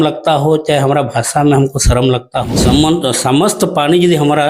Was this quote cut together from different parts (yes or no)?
yes